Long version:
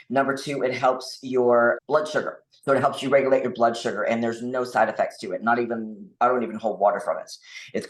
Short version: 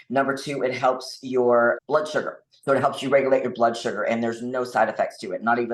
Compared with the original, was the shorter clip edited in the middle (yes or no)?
no